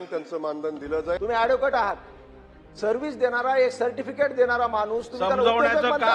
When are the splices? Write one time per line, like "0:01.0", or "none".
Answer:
0:01.2